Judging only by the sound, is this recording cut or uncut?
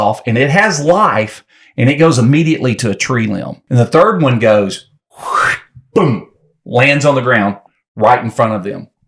cut